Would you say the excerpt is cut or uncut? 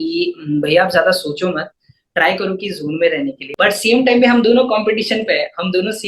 cut